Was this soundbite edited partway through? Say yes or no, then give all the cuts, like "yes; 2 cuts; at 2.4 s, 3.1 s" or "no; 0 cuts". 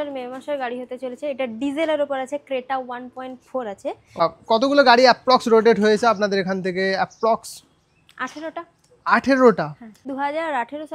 yes; 2 cuts; at 4.2 s, 9.8 s